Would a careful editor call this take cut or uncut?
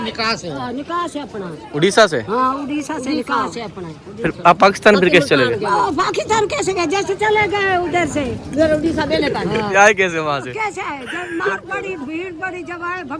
uncut